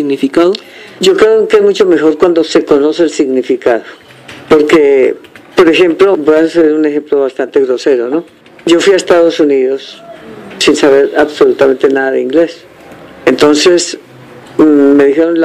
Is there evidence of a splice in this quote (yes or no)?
yes